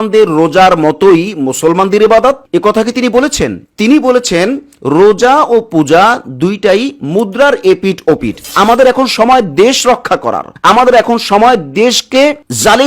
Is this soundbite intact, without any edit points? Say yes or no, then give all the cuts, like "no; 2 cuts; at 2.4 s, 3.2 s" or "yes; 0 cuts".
no; 2 cuts; at 3.6 s, 8.4 s